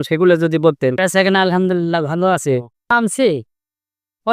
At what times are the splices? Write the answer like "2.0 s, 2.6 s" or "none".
1.0 s, 2.9 s